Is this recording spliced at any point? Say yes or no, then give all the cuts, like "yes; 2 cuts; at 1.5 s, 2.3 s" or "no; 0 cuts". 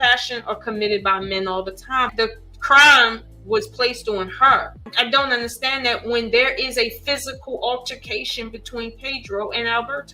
yes; 2 cuts; at 2.1 s, 4.9 s